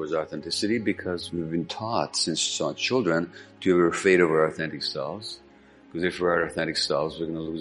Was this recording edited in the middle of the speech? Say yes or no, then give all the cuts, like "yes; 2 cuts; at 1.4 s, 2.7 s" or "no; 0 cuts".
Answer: yes; 1 cut; at 1.2 s